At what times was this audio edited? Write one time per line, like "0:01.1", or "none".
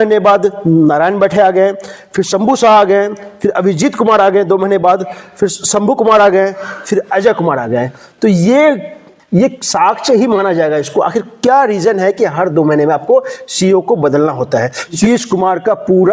0:15.0